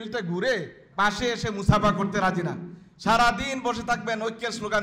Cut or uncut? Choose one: uncut